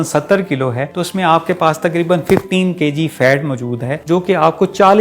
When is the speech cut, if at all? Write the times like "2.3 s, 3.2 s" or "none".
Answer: 0.9 s, 3.9 s